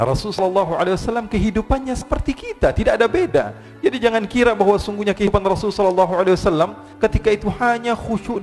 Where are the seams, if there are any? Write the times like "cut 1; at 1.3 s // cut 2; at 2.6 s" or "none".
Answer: none